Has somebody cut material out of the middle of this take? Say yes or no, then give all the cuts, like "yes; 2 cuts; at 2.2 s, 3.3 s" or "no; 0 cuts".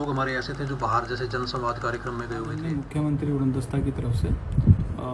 yes; 1 cut; at 2.6 s